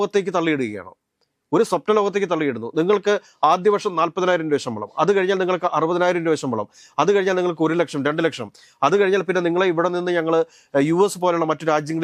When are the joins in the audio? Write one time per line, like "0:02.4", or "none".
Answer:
none